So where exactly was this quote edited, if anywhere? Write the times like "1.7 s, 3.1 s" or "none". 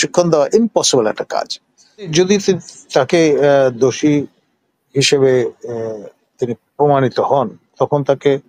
2.1 s